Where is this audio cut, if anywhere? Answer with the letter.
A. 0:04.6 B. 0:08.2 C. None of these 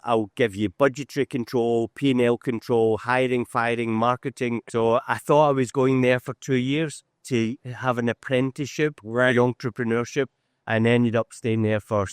A